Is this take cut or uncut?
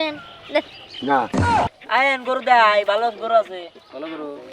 cut